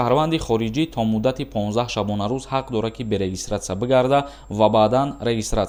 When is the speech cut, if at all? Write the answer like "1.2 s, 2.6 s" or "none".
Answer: none